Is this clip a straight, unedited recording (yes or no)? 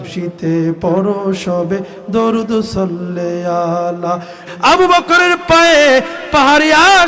no